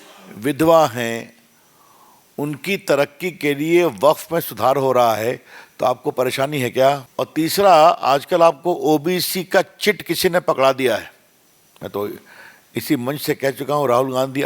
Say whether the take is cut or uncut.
cut